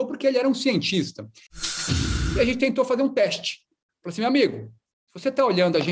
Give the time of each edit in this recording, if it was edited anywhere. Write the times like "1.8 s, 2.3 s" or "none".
1.8 s

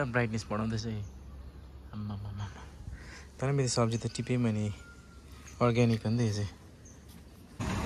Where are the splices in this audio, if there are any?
none

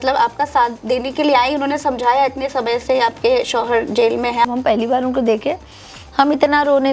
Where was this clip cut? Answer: 4.4 s

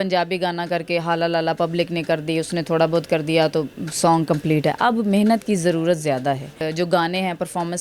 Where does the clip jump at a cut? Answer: 6.6 s

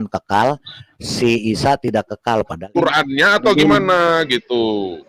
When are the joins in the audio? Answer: 2.7 s

